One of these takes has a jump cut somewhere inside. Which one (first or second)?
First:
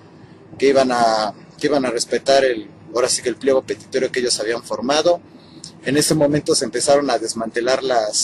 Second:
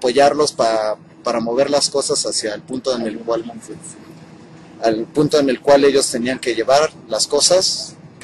first